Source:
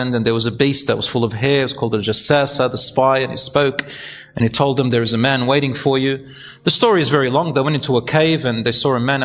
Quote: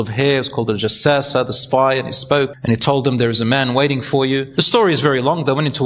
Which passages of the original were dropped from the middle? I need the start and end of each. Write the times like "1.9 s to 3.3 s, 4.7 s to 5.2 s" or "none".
3.8 s to 4.3 s, 6.2 s to 6.6 s